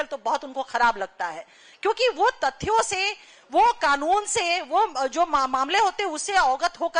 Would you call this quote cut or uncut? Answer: uncut